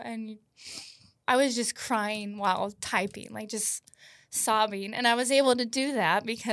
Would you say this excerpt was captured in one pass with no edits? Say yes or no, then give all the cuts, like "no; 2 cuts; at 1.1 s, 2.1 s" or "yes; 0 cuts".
no; 1 cut; at 1.2 s